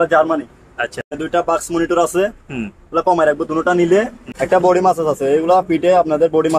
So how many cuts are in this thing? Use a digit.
2